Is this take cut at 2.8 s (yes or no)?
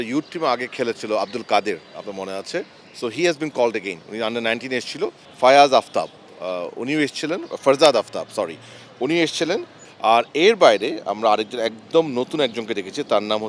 no